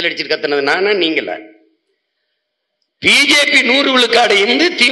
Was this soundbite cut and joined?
no; 0 cuts

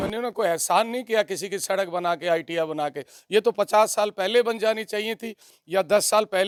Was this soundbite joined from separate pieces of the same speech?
no; 0 cuts

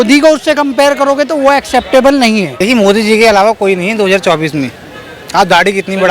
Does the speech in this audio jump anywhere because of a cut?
yes; 1 cut; at 2.5 s

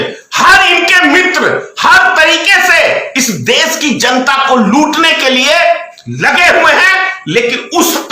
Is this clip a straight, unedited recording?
yes; 0 cuts

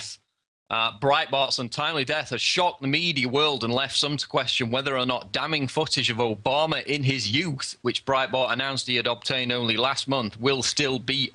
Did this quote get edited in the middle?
no; 0 cuts

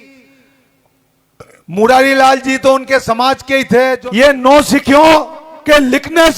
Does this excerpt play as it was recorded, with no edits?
no; 1 cut; at 4.0 s

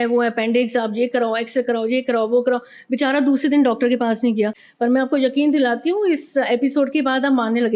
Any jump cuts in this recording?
yes; 1 cut; at 4.6 s

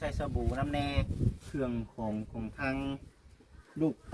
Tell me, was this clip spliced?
yes; 1 cut; at 1.5 s

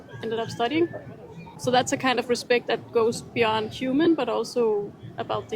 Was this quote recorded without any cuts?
no; 1 cut; at 1.5 s

